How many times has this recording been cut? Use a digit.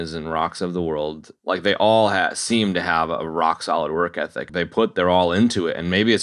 2